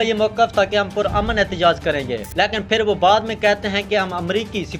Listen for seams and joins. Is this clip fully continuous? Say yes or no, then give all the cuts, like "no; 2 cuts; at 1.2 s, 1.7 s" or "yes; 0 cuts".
yes; 0 cuts